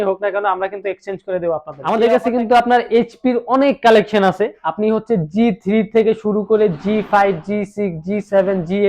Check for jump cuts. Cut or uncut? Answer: cut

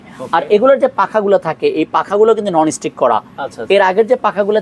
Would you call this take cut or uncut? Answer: uncut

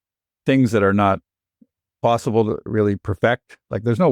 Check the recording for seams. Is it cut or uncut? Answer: cut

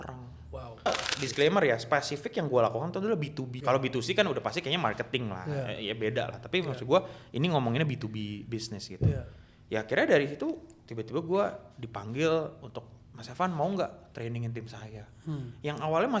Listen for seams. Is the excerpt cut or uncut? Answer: cut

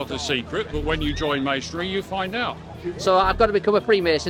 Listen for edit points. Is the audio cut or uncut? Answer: uncut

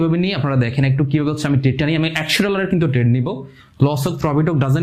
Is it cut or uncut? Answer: uncut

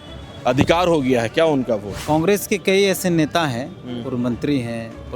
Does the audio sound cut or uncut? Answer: cut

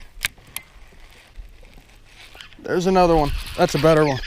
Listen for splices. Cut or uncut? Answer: cut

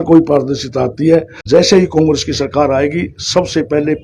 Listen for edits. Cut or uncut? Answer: cut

